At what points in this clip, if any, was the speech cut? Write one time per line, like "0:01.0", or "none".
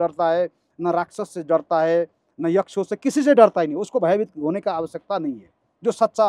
none